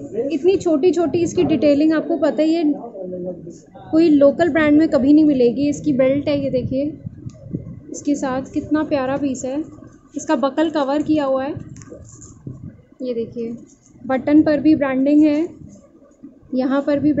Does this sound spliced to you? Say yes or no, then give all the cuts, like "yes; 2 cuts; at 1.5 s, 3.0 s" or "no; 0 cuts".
no; 0 cuts